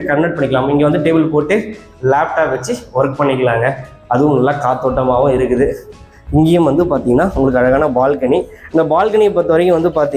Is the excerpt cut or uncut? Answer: uncut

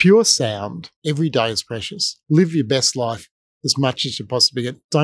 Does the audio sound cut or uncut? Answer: cut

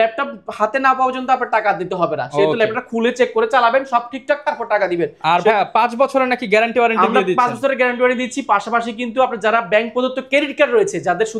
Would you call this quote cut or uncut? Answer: uncut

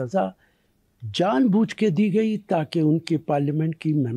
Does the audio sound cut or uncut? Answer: uncut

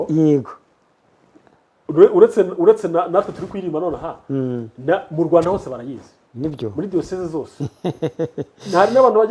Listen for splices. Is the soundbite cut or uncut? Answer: uncut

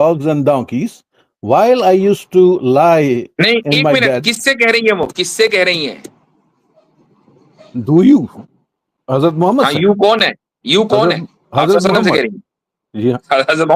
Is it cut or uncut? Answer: uncut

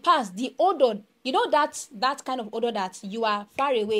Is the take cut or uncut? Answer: uncut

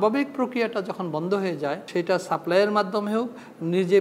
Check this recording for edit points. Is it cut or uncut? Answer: cut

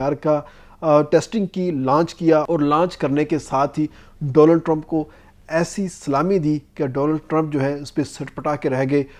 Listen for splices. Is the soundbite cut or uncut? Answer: uncut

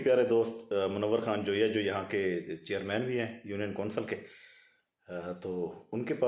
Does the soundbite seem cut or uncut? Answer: uncut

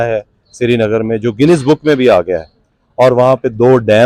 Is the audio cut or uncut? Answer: uncut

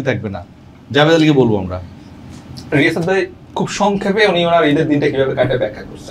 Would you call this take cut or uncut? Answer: uncut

